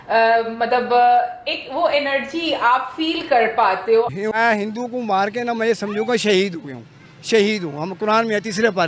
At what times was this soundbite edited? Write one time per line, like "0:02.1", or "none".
0:04.1